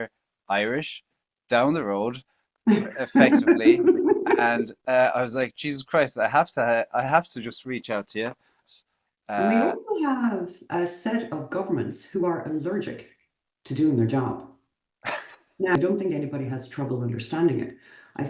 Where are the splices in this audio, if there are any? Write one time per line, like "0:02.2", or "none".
0:08.6
0:15.8

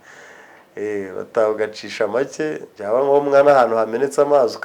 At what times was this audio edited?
0:02.7

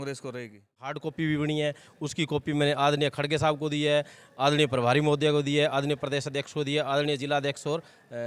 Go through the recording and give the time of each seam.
0:01.0

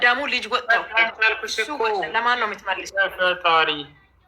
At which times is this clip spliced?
none

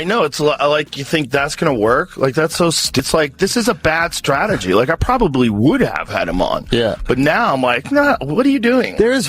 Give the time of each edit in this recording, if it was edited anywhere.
0:03.0

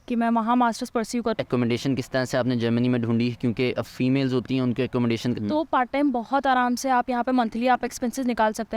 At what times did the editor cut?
0:01.3
0:05.3

